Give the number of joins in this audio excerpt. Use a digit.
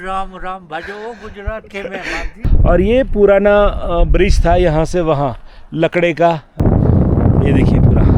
2